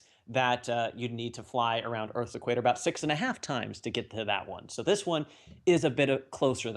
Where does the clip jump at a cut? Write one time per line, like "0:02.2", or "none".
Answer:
0:03.6